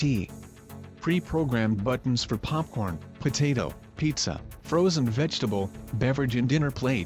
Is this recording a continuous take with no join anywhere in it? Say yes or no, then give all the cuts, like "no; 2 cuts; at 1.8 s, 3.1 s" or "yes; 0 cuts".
yes; 0 cuts